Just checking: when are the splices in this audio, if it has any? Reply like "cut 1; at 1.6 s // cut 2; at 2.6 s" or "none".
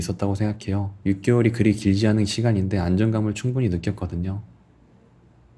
cut 1; at 0.9 s